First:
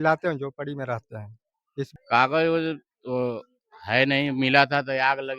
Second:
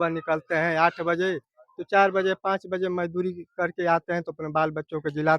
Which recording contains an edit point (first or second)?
first